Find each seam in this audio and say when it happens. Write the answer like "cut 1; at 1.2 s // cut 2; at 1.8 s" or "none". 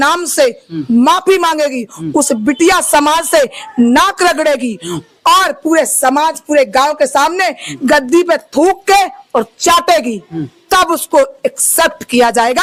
none